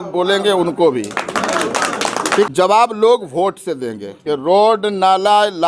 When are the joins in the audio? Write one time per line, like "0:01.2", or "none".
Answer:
0:02.5
0:04.1